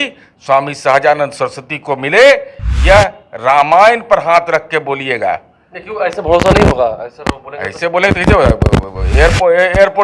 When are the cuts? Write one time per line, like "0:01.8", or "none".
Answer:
none